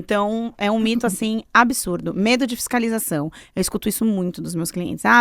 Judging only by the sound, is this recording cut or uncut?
uncut